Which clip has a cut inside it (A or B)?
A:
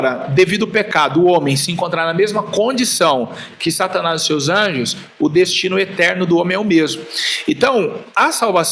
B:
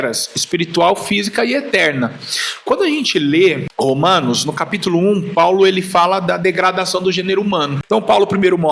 B